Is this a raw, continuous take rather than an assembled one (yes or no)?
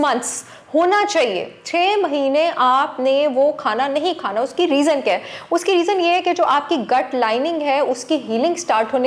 yes